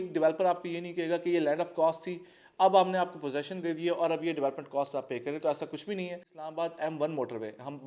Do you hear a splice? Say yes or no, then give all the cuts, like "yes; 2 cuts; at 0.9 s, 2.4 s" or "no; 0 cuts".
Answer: yes; 1 cut; at 6.4 s